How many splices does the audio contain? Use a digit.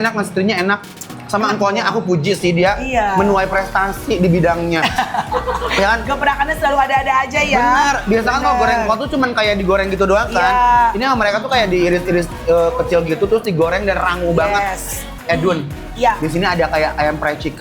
0